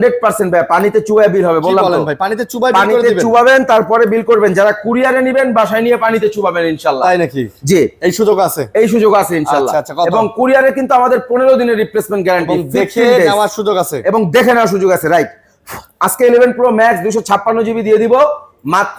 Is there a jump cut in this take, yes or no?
no